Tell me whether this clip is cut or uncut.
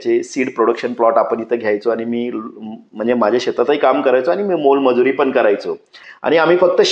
cut